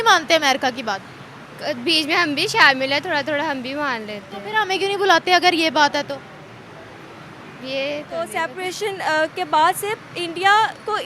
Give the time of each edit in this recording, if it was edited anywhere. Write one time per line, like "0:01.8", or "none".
0:08.2

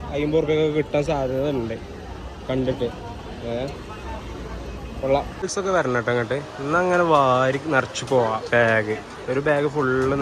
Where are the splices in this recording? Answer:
0:05.3

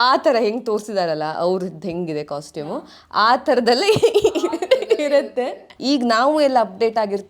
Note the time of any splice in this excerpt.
0:05.7

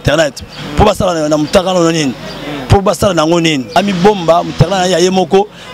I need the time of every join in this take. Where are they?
0:03.8

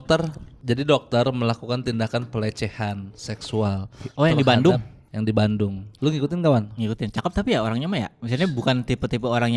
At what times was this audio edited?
0:05.8

